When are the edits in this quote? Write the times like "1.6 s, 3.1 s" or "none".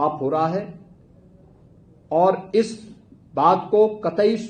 none